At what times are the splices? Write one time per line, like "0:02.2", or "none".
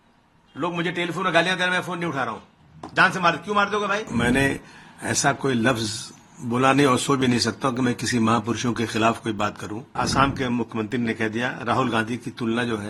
0:04.1
0:09.9

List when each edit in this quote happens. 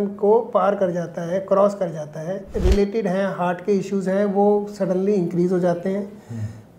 0:02.5

